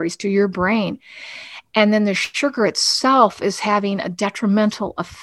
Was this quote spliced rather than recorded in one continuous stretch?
no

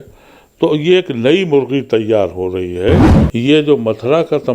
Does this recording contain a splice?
yes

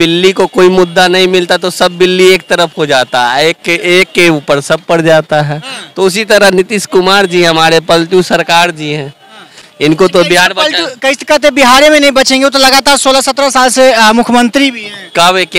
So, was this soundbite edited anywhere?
no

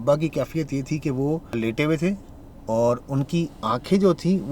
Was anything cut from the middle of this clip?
yes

